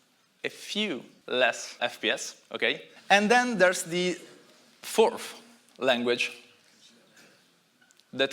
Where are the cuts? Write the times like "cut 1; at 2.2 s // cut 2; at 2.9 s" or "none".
cut 1; at 1.1 s // cut 2; at 1.8 s // cut 3; at 2.9 s